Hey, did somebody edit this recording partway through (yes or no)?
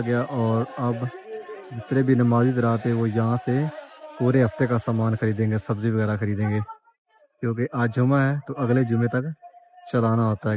no